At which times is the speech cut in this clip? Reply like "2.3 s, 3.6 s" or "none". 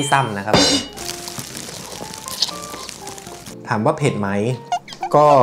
0.9 s